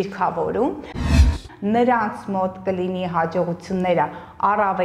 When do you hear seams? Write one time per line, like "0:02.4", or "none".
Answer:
0:01.1